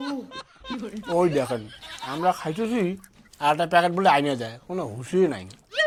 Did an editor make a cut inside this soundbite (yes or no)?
no